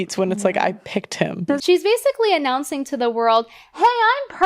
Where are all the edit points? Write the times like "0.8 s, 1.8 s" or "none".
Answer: 1.4 s